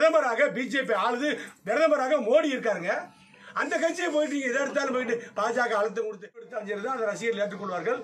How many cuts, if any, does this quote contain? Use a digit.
1